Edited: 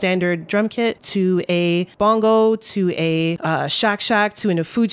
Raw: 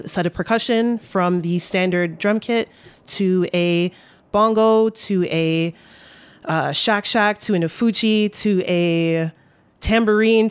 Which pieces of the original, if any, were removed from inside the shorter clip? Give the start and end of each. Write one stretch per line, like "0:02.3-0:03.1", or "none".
0:02.7-0:03.1
0:03.9-0:04.2
0:05.7-0:06.4